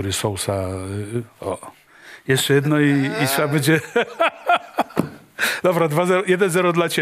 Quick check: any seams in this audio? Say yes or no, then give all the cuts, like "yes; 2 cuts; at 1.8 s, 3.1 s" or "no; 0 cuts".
no; 0 cuts